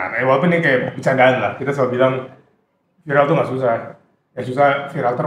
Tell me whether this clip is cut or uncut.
uncut